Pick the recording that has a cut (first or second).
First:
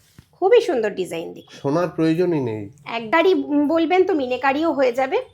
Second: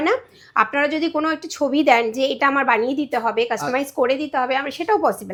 first